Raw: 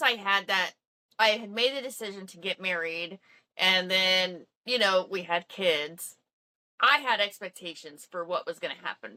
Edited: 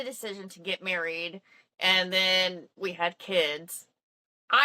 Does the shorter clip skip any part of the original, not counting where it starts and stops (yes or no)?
yes